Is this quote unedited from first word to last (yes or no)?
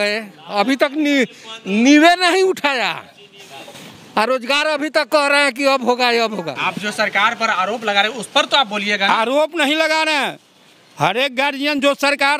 no